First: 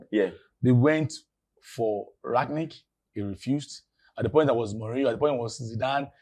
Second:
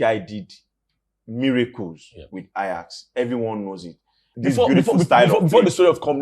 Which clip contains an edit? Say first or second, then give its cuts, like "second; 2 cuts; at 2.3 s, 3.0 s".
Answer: second; 1 cut; at 4.3 s